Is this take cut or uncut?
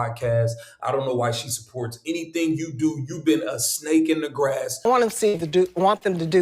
cut